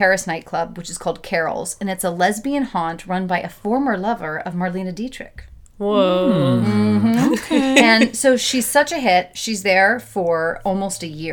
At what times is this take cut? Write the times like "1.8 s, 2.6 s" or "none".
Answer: none